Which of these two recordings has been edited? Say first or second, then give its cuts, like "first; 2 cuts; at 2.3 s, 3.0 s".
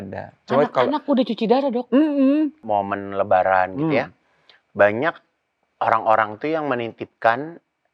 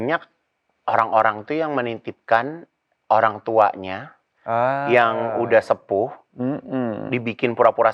first; 1 cut; at 2.6 s